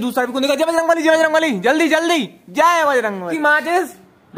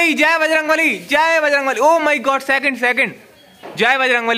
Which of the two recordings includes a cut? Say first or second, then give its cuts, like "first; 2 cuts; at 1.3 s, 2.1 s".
first; 1 cut; at 3.3 s